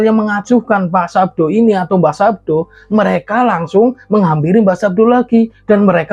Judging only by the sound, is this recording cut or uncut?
uncut